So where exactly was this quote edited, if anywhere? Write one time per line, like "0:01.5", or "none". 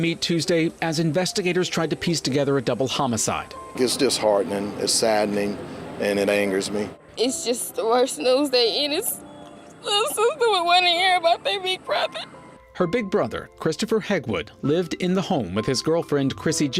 0:07.0